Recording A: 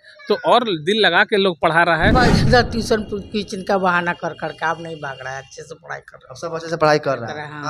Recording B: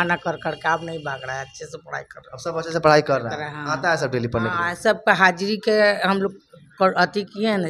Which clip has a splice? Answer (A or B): A